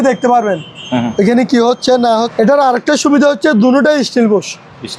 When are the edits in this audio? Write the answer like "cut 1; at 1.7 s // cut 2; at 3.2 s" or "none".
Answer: cut 1; at 2.3 s